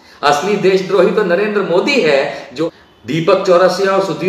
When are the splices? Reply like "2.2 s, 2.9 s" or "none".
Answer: 2.5 s